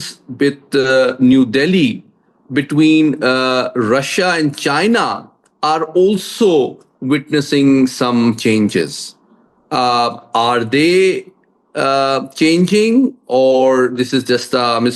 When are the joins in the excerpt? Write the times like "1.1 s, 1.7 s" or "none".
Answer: none